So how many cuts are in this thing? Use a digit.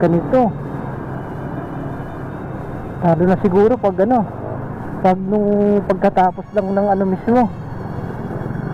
0